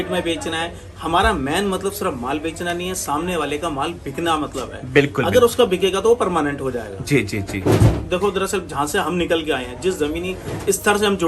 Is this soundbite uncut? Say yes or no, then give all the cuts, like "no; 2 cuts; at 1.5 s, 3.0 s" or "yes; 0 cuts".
yes; 0 cuts